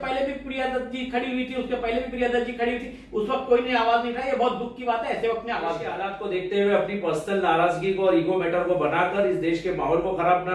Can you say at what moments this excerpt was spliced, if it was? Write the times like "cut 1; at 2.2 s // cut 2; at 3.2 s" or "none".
cut 1; at 6.1 s